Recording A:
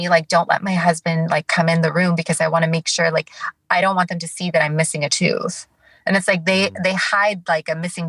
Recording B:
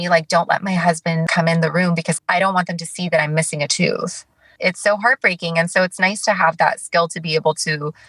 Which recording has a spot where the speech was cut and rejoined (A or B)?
B